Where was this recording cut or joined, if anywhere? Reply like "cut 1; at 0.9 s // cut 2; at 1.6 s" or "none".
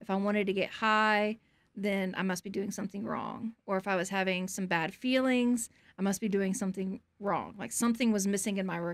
none